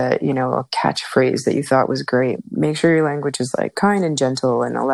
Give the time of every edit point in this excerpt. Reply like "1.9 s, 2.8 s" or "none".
2.3 s